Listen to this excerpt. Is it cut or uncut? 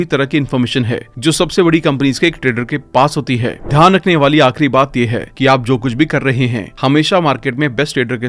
cut